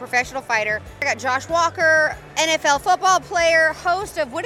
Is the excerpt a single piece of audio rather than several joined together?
no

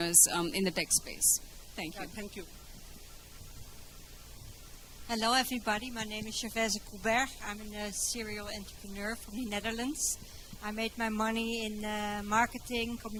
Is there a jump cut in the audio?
no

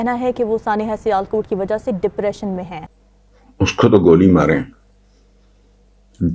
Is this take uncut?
no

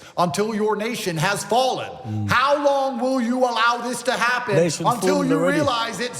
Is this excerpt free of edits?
no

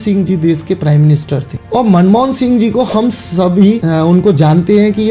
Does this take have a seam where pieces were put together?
yes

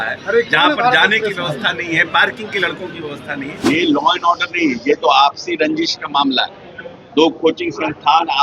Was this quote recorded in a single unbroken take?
no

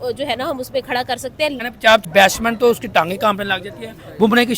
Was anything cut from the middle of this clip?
yes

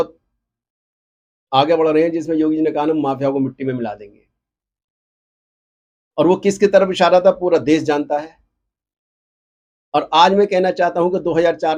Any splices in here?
no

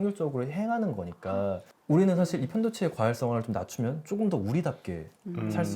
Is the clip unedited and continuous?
yes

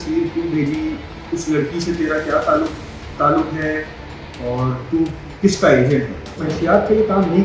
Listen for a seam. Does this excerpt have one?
yes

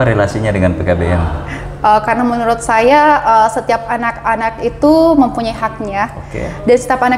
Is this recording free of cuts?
yes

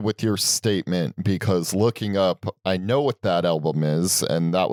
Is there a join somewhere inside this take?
no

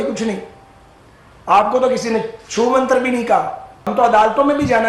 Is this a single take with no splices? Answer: no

